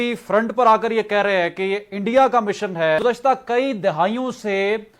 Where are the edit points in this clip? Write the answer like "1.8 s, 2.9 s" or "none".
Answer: 3.0 s